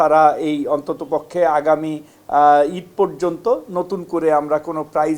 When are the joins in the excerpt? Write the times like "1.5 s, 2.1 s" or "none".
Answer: none